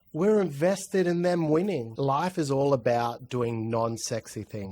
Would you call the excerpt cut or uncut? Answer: cut